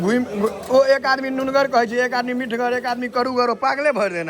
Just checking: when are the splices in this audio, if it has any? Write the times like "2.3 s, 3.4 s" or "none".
none